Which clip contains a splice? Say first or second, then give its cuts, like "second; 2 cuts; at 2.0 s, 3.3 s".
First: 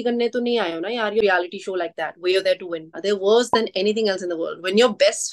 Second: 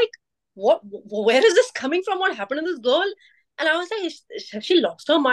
first; 1 cut; at 1.2 s